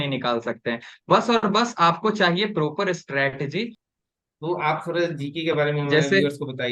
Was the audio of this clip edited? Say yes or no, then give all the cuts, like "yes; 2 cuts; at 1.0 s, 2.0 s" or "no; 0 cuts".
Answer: yes; 1 cut; at 3.8 s